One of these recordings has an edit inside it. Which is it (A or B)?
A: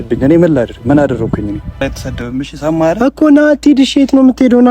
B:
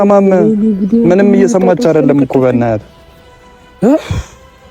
A